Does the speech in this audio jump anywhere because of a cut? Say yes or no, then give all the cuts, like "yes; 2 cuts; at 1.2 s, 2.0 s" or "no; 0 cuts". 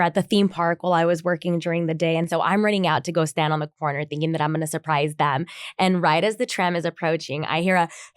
yes; 1 cut; at 2.3 s